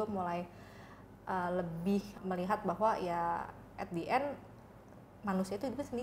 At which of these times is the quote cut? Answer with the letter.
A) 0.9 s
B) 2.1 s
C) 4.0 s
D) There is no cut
B